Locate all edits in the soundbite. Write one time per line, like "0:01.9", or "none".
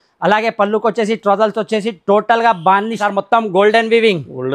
0:03.0